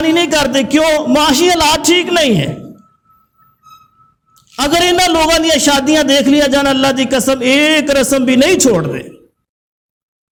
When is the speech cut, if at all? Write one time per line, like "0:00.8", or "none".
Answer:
none